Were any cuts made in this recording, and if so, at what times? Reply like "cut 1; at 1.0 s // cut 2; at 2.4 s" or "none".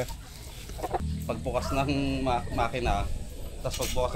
cut 1; at 1.0 s